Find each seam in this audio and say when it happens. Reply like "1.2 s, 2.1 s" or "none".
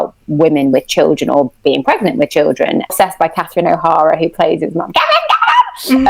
2.9 s